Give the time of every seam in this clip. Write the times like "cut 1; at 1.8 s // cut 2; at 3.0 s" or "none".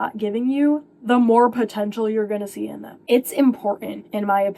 cut 1; at 2.9 s